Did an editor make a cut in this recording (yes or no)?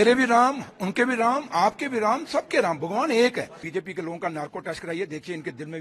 yes